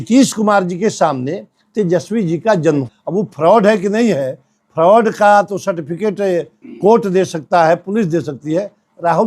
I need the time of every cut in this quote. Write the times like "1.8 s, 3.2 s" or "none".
3.0 s